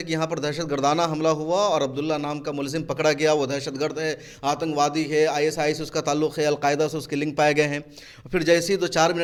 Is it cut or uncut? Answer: uncut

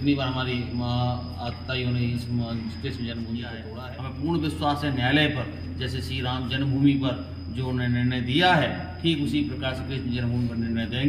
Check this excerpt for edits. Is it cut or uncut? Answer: cut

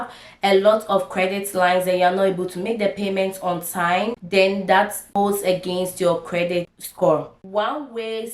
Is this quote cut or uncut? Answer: cut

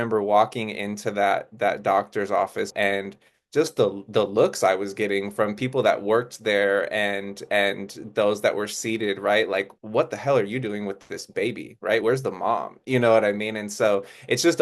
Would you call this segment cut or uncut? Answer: cut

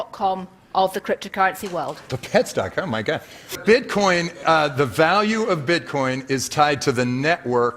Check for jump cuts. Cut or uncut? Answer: cut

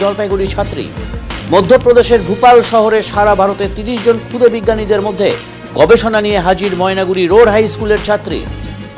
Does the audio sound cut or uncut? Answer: uncut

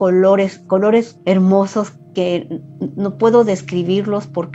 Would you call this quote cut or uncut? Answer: cut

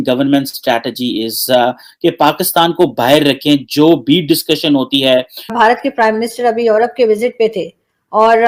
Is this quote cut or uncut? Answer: uncut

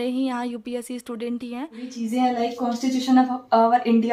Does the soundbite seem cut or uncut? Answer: cut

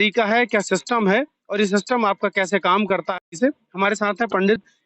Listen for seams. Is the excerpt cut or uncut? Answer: cut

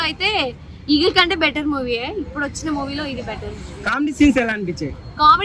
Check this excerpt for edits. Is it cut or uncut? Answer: uncut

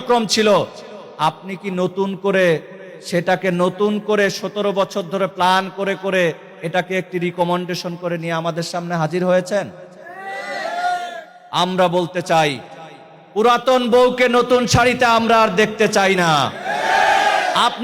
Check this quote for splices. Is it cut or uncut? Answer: uncut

